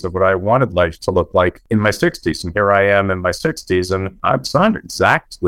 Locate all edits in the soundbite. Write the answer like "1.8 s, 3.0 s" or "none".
1.6 s, 4.1 s

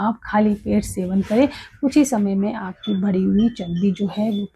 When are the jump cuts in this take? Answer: none

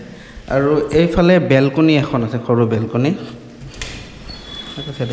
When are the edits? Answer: none

